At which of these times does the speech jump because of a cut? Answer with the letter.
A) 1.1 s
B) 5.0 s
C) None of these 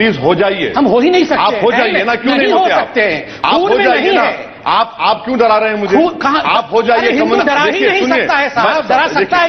C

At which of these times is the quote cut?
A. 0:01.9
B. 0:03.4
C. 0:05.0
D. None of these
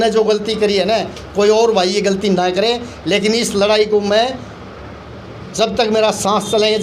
D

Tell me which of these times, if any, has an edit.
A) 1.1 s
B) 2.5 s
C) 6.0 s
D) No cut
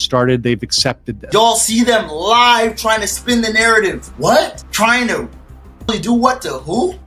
A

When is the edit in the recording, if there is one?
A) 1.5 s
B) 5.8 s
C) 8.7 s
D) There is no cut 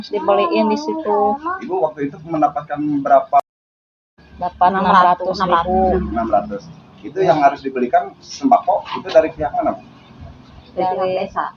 D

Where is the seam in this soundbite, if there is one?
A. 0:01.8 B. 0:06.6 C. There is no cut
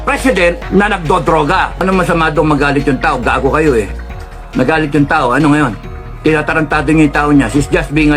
A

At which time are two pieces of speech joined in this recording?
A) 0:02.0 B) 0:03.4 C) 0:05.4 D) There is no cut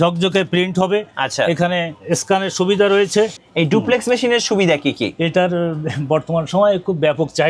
B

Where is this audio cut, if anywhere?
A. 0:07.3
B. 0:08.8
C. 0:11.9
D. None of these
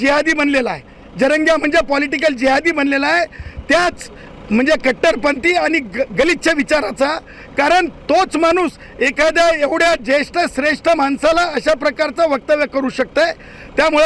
D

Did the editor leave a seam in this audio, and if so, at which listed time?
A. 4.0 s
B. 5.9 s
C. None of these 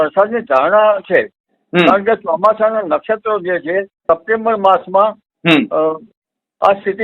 A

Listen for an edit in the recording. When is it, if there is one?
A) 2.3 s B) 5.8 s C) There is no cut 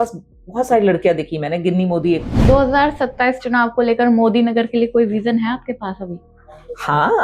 A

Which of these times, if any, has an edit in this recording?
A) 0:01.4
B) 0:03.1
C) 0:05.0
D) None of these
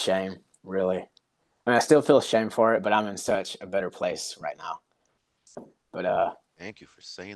D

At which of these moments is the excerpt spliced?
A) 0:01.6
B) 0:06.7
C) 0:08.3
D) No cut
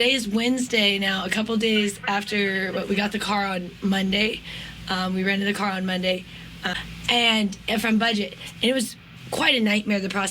B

